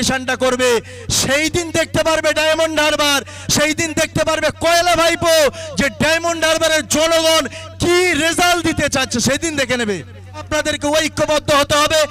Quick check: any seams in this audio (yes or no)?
yes